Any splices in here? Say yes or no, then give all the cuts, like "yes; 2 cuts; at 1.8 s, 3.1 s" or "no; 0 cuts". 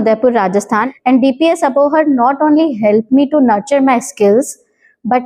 yes; 1 cut; at 0.9 s